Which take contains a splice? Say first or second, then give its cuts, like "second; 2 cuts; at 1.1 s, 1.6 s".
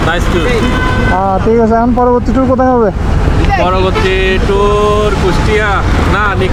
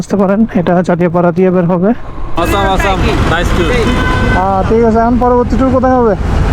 second; 1 cut; at 2.3 s